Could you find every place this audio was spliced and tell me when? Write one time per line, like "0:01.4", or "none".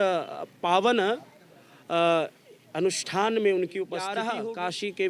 0:04.2